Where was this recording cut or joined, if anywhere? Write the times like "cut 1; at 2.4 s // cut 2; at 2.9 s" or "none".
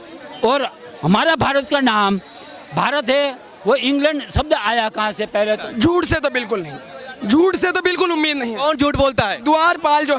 cut 1; at 5.6 s